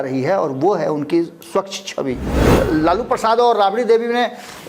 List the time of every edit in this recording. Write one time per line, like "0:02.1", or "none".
0:02.3